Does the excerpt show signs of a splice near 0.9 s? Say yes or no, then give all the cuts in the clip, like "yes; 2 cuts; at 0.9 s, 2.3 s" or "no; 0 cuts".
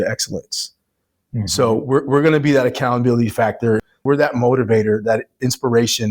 no; 1 cut; at 3.9 s